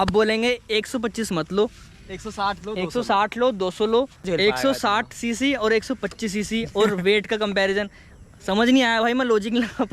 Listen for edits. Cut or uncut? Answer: cut